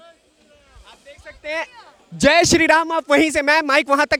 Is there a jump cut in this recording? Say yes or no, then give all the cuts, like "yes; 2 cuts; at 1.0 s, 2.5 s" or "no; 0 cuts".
no; 0 cuts